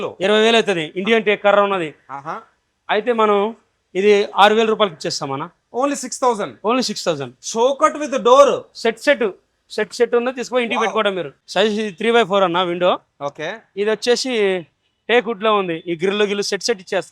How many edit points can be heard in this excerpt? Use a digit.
1